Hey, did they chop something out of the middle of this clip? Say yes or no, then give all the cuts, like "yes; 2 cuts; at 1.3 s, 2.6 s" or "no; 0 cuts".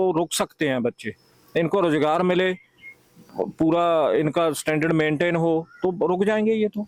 no; 0 cuts